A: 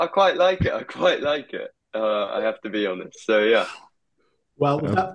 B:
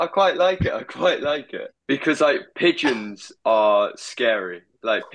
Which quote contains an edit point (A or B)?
B